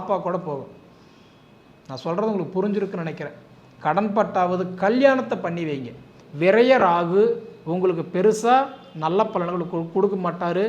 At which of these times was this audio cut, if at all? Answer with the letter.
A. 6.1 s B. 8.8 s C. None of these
A